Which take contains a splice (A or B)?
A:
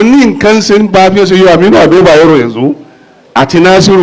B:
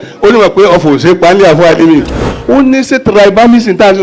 B